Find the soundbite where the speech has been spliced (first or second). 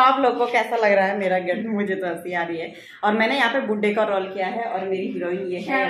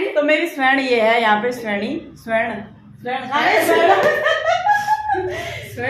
first